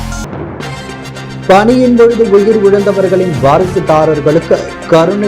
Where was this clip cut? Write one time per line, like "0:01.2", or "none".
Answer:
0:00.9

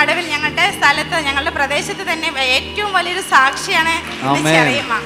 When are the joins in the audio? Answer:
none

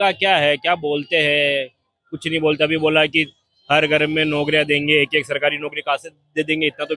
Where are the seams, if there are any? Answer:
none

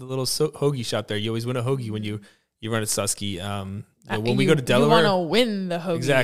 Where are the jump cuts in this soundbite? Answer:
none

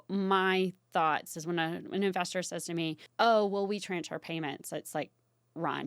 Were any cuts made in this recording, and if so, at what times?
0:03.0

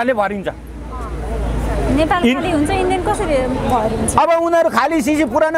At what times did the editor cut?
none

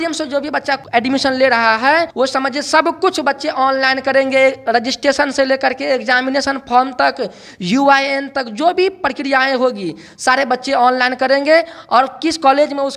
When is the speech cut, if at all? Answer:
0:00.8
0:02.1

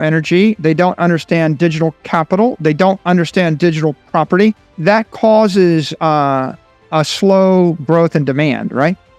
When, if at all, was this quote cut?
0:04.7

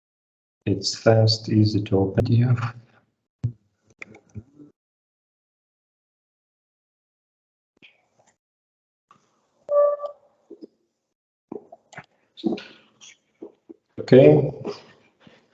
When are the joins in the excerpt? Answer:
0:02.2

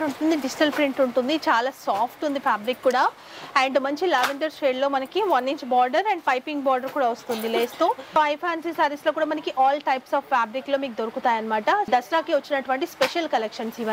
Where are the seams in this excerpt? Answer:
0:08.1
0:11.9

